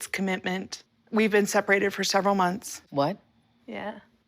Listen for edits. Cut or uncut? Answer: cut